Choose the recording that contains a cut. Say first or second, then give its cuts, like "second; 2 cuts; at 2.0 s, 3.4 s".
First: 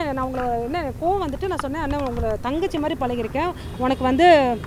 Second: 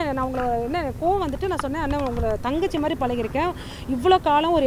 first; 1 cut; at 3.7 s